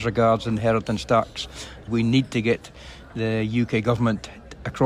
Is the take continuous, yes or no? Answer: yes